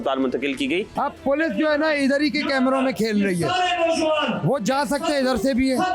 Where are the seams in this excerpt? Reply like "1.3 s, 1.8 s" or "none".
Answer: 0.9 s